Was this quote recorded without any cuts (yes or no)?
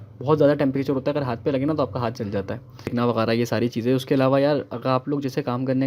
no